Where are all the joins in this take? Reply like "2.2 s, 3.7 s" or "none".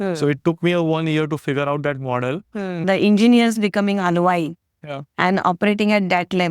2.8 s